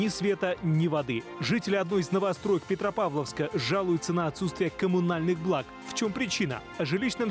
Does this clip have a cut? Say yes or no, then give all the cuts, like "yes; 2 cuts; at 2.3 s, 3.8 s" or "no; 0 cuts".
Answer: no; 0 cuts